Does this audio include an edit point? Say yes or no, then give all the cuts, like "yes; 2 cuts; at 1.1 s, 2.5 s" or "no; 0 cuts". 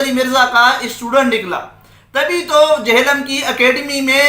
no; 0 cuts